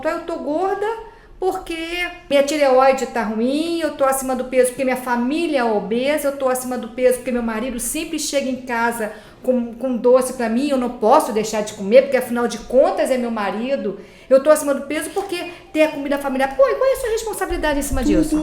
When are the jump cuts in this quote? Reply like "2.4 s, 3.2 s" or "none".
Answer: 2.3 s